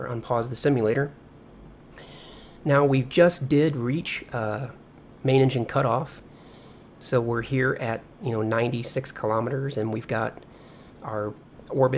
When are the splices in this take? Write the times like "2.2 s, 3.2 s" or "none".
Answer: 9.1 s